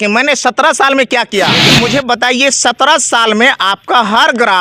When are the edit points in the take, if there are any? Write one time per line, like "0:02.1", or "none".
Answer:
0:01.6